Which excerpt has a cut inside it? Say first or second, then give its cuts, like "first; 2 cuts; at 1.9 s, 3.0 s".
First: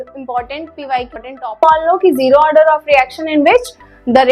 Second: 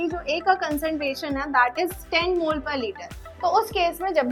first; 1 cut; at 1.1 s